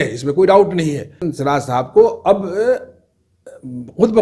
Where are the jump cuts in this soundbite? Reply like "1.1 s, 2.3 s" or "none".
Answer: 1.3 s